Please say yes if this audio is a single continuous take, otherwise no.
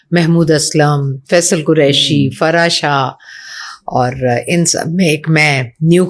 yes